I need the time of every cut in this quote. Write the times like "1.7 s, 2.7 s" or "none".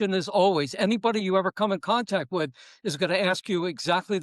none